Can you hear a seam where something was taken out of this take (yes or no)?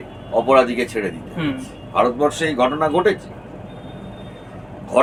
no